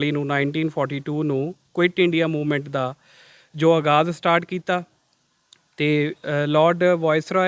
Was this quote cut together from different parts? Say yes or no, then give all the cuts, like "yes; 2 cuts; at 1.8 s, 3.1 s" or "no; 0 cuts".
no; 0 cuts